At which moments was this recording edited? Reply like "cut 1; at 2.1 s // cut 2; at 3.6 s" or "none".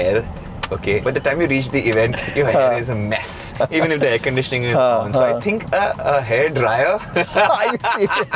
cut 1; at 1.0 s // cut 2; at 3.5 s